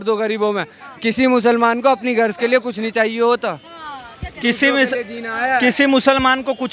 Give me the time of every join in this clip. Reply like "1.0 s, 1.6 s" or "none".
none